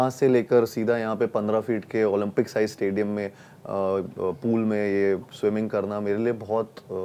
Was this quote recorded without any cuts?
yes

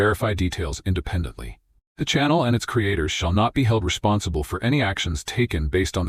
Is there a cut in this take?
no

